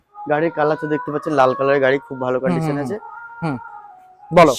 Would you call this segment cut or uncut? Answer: uncut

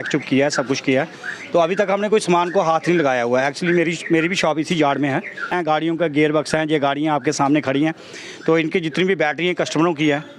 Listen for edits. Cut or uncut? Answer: cut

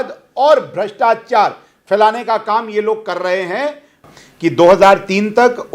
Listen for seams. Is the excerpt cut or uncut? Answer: cut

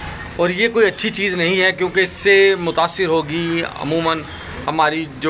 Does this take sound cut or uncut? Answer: uncut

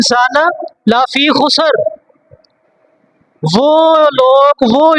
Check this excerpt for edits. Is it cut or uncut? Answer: uncut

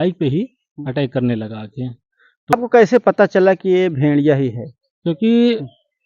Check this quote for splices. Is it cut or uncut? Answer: cut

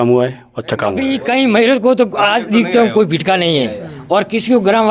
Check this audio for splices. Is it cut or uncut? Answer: cut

